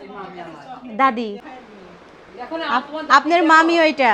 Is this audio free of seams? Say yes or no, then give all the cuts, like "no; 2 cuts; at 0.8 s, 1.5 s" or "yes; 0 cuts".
no; 1 cut; at 1.4 s